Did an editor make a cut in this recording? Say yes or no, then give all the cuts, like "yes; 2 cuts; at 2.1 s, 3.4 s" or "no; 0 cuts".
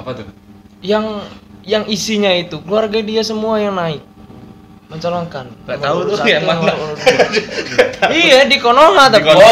no; 0 cuts